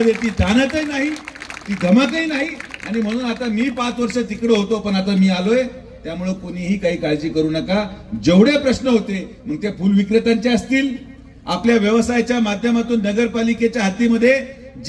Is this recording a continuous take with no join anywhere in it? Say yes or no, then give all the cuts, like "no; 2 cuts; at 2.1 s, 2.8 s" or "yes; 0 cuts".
yes; 0 cuts